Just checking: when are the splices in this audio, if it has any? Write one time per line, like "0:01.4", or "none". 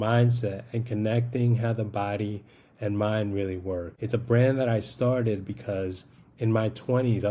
0:03.9